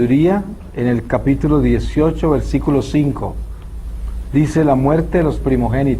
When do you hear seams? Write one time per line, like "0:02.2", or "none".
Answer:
0:02.3